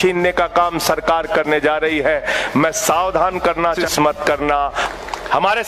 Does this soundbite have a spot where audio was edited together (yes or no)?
yes